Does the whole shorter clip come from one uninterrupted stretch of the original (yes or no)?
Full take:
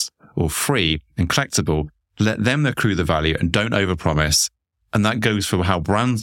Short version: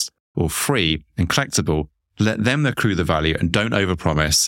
yes